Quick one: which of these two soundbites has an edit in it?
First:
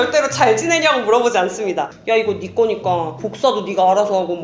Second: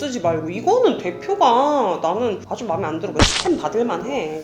first; 1 cut; at 1.9 s

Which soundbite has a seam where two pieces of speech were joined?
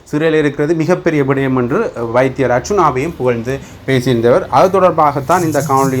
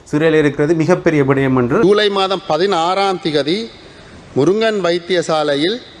second; 1 cut; at 1.8 s

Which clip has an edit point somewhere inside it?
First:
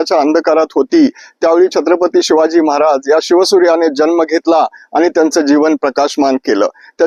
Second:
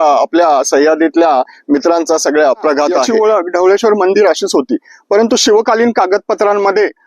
second; 1 cut; at 3.1 s

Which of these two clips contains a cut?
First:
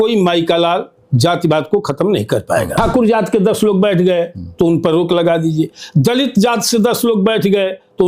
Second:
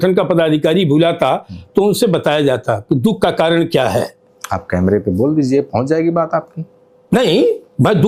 first; 1 cut; at 2.7 s

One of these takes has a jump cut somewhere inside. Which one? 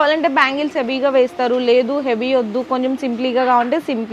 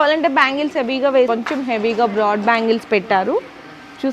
second; 1 cut; at 1.3 s

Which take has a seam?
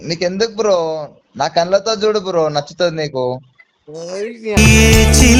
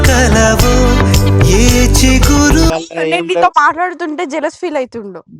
second; 1 cut; at 2.7 s

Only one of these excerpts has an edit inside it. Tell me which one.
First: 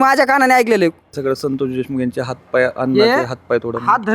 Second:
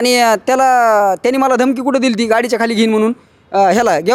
first; 1 cut; at 1.1 s

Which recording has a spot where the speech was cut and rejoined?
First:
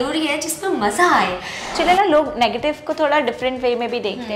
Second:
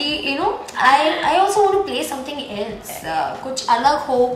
first; 1 cut; at 1.8 s

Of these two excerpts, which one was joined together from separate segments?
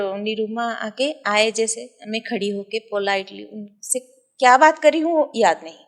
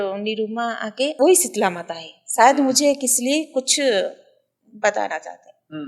second; 1 cut; at 1.1 s

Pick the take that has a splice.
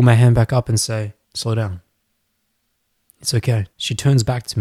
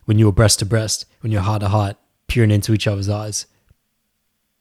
first; 2 cuts; at 1.2 s, 3.7 s

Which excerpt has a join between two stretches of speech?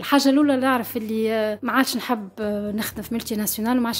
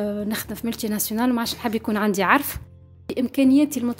second; 1 cut; at 2.7 s

